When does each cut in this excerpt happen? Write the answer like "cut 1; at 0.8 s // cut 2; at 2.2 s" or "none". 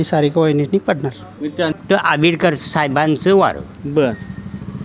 cut 1; at 1.8 s